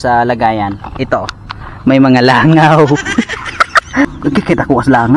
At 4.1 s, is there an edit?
yes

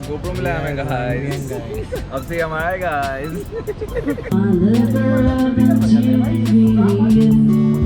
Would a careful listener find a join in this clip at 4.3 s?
yes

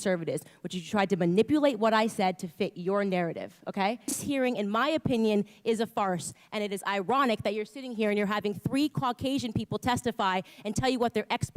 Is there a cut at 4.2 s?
yes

